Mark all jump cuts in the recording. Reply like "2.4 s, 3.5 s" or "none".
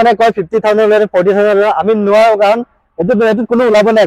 none